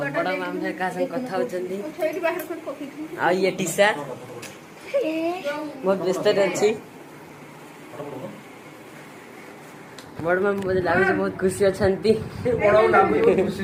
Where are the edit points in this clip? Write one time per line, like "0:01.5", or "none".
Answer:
none